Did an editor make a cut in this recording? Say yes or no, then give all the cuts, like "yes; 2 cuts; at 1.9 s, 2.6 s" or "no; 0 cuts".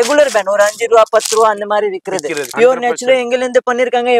yes; 1 cut; at 2.4 s